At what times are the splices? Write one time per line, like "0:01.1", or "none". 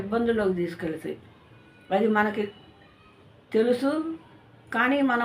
none